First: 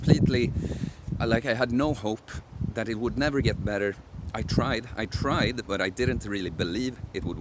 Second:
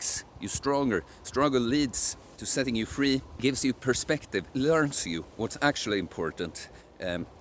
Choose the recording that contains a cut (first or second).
second